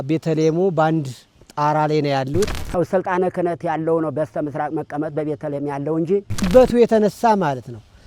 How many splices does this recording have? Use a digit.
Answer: 2